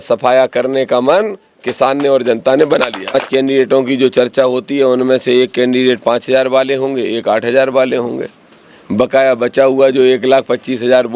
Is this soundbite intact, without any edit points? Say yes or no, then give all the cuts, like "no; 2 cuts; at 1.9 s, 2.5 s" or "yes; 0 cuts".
no; 1 cut; at 3.1 s